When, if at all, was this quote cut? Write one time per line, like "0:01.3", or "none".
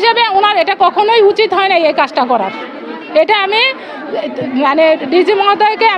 none

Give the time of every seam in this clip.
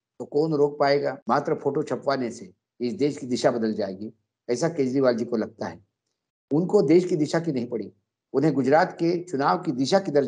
0:01.2

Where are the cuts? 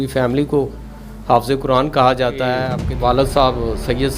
0:02.8

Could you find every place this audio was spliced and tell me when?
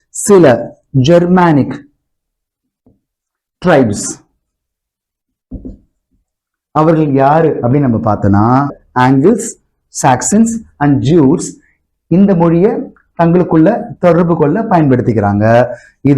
0:08.8

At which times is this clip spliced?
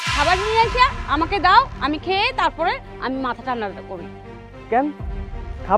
none

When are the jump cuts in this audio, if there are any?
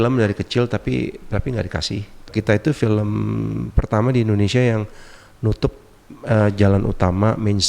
0:02.3

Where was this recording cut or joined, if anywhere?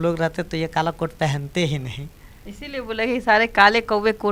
none

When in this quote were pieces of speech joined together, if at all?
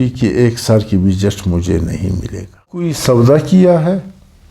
0:02.9

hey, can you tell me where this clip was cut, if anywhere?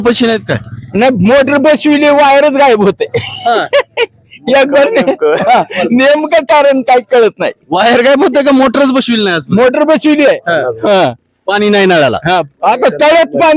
none

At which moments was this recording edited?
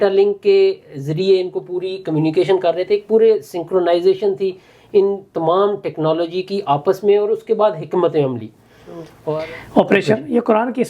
0:09.2

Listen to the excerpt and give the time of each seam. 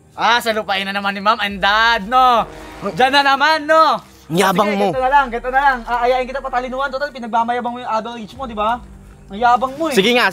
none

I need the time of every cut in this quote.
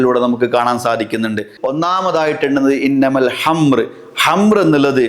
0:01.5

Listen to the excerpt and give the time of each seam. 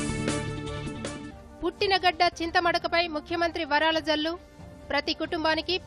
0:01.2

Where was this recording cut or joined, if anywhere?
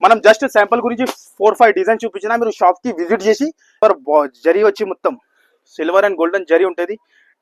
0:03.8

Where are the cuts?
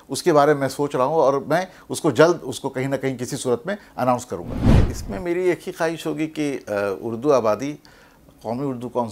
0:04.6

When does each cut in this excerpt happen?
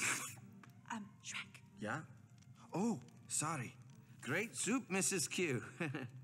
none

